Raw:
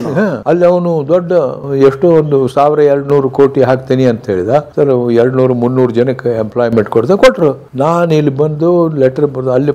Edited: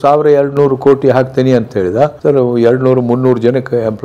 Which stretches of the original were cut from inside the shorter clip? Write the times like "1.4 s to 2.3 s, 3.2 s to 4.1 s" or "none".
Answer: none